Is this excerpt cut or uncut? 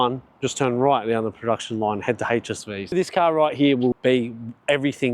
cut